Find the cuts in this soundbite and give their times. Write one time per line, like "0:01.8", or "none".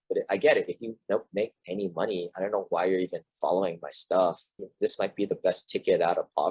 none